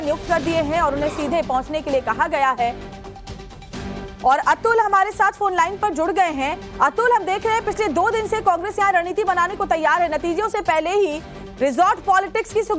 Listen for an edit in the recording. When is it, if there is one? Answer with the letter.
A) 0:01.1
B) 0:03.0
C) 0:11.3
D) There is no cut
B